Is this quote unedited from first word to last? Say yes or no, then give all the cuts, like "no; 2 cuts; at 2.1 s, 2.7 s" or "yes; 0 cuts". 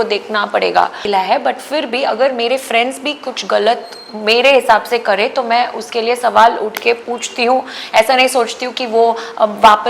no; 1 cut; at 1.0 s